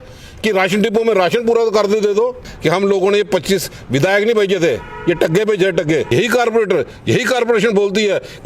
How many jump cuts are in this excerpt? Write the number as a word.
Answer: two